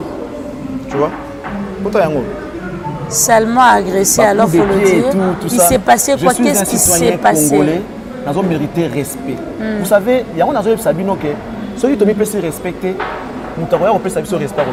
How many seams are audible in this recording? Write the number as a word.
zero